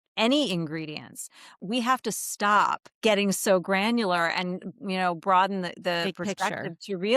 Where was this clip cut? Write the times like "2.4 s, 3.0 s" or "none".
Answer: 1.5 s, 2.9 s